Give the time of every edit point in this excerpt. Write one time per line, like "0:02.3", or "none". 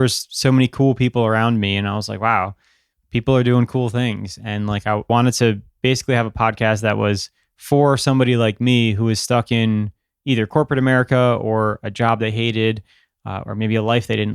0:05.1